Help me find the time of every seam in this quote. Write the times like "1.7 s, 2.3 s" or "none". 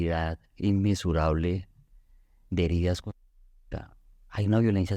none